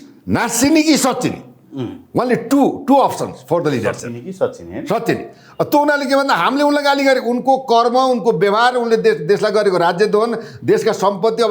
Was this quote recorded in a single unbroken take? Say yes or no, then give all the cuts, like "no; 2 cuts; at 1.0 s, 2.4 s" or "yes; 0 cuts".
yes; 0 cuts